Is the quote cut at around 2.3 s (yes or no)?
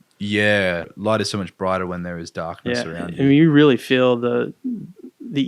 no